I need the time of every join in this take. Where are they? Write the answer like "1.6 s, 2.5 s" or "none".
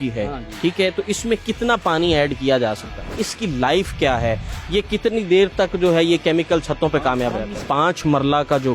3.3 s, 7.6 s